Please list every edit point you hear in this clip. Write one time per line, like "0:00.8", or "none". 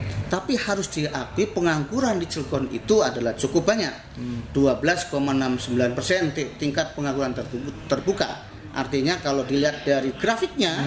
none

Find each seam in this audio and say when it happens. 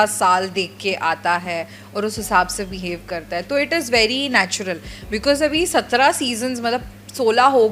none

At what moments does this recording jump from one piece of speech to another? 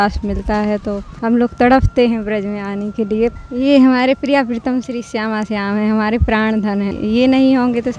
0:01.1
0:03.4
0:06.9

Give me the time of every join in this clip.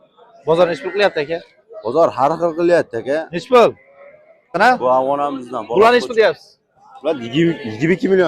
0:04.6

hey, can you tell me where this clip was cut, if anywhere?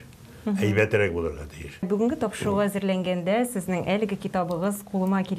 0:01.9

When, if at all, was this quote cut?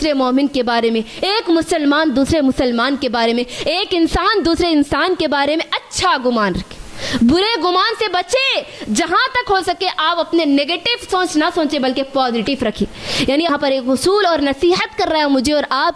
0:13.5

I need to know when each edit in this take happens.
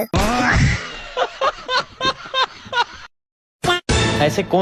0:03.2

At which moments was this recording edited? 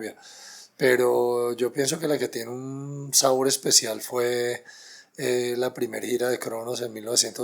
none

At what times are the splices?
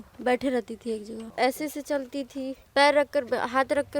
0:01.2
0:02.6

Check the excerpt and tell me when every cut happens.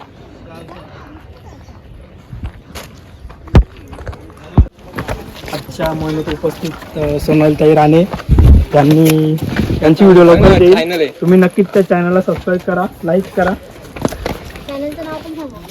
0:04.8

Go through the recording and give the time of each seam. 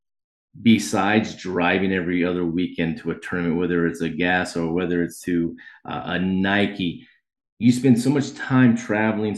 none

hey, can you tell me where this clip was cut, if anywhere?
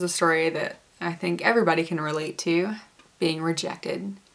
none

